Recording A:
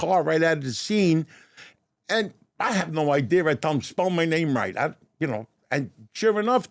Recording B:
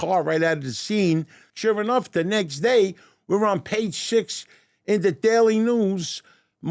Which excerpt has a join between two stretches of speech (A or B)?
B